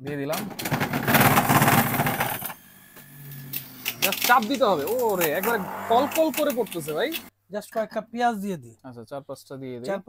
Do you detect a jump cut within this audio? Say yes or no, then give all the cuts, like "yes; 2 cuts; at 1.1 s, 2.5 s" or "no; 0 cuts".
yes; 1 cut; at 7.3 s